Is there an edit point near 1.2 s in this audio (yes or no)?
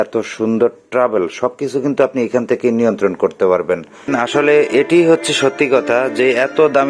no